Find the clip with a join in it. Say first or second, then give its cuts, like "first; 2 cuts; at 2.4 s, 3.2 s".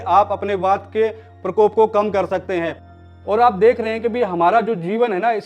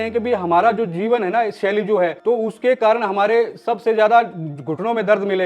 first; 1 cut; at 2.9 s